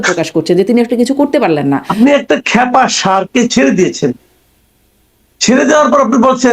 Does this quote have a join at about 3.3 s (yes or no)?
no